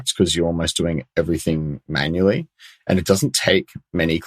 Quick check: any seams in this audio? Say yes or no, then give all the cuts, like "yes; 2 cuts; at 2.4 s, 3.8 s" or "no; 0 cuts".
no; 0 cuts